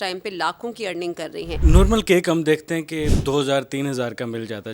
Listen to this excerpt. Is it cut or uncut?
cut